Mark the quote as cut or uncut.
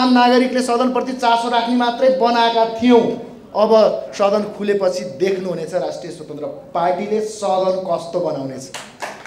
uncut